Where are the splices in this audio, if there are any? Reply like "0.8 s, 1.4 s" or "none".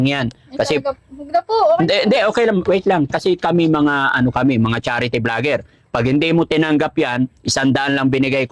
none